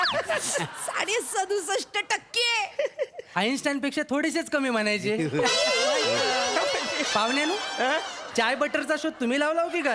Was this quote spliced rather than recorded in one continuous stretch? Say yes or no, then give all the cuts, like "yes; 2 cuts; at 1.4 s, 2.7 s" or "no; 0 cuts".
no; 0 cuts